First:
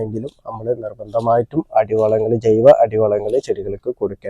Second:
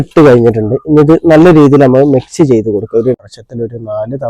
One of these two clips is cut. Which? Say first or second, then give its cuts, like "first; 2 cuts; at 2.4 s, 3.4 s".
second; 1 cut; at 3.2 s